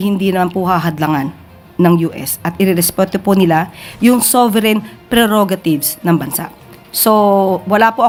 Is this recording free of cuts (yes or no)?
yes